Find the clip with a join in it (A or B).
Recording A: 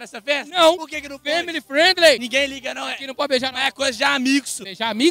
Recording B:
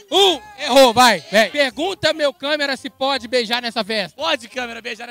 B